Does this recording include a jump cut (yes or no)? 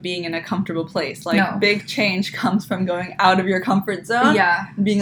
no